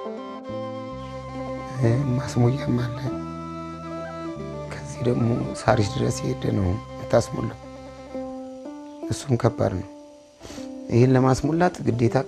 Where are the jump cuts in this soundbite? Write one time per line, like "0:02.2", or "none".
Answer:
0:01.1